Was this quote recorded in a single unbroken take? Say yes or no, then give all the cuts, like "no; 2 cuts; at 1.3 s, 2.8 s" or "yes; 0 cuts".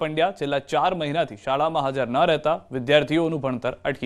no; 1 cut; at 3.1 s